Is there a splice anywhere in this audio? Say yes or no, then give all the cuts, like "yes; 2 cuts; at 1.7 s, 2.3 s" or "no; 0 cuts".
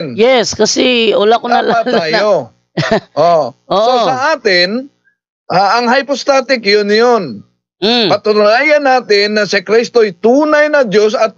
no; 0 cuts